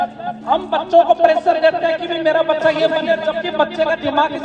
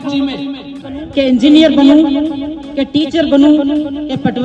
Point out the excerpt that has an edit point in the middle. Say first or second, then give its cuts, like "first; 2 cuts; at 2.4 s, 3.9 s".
second; 1 cut; at 1.1 s